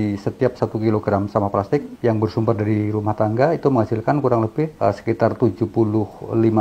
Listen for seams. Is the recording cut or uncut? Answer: cut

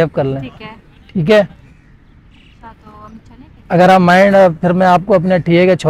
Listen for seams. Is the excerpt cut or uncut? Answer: uncut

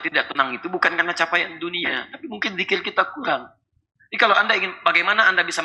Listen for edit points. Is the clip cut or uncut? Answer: uncut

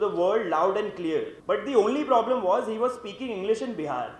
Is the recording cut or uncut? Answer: cut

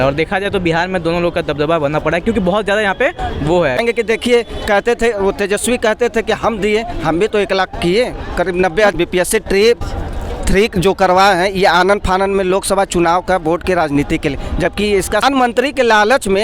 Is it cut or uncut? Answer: cut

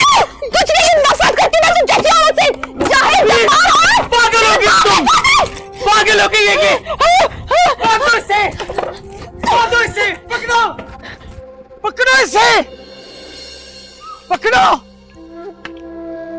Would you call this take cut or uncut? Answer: uncut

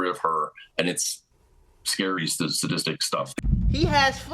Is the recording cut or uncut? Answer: cut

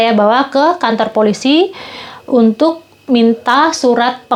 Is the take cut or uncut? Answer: uncut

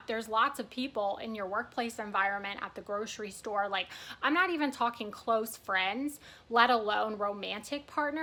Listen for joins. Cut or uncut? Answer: uncut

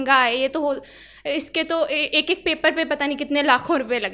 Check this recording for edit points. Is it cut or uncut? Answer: uncut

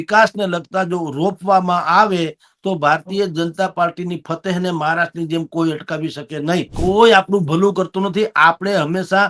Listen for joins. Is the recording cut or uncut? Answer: cut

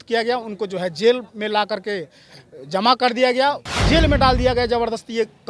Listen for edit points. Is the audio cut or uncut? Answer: cut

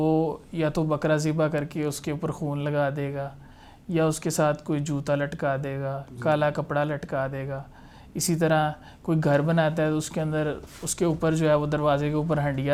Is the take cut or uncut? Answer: uncut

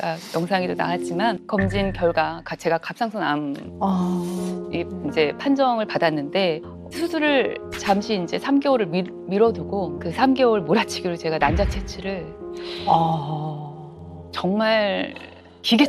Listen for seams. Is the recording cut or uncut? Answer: cut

